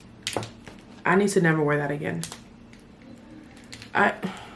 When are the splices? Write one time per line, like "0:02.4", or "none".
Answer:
none